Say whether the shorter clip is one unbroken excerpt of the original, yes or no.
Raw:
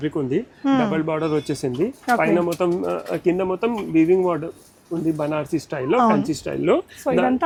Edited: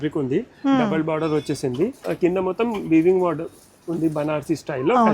no